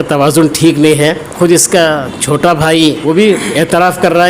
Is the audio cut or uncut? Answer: cut